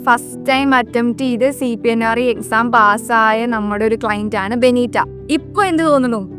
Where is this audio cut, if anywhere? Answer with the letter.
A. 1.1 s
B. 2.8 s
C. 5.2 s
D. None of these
C